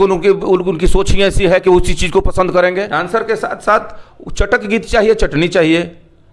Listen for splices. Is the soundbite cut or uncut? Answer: cut